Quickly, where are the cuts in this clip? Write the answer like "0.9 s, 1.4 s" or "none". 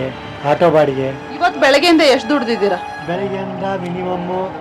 1.2 s